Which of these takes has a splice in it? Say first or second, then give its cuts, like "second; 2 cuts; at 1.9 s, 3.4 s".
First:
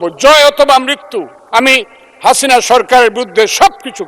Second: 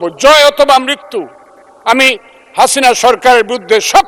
first; 1 cut; at 1.4 s